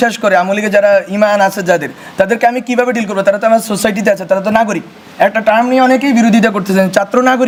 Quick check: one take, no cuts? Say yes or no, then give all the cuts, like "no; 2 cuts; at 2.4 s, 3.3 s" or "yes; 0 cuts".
yes; 0 cuts